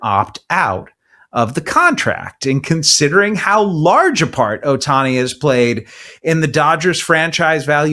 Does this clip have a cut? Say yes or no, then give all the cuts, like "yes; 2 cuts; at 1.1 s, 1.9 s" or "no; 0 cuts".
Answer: no; 0 cuts